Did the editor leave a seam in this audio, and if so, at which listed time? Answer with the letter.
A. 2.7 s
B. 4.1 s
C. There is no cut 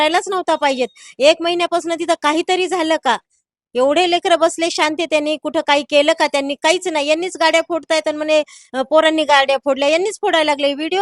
C